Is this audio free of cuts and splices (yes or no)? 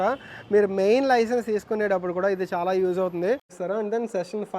no